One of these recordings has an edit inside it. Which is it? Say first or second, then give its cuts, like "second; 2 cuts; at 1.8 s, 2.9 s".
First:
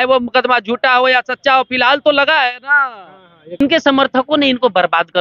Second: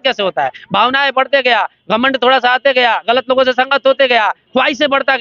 first; 1 cut; at 3.6 s